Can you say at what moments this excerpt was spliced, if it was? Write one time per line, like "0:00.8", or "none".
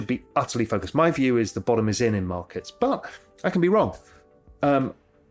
none